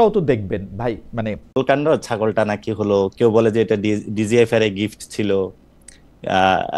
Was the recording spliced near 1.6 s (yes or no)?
yes